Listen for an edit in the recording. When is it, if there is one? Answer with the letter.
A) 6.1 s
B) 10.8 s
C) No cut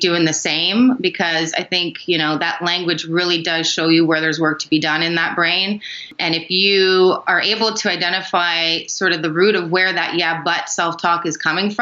A